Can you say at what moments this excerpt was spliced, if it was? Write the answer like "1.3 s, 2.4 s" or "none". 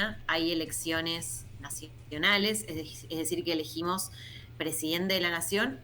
none